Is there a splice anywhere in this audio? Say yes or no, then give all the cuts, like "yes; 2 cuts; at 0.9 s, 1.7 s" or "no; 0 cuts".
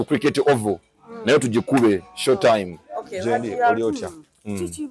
yes; 1 cut; at 3.8 s